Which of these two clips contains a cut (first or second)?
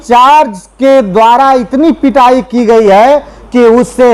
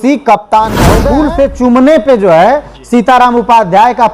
second